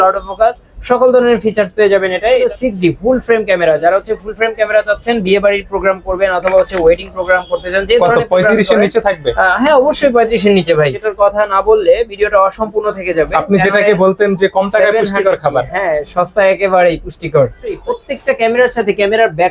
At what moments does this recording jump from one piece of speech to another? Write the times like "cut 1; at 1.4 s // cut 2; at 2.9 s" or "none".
cut 1; at 2.4 s // cut 2; at 11.0 s // cut 3; at 17.8 s